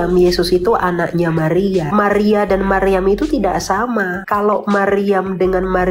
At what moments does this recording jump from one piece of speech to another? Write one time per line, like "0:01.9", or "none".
0:01.9
0:04.2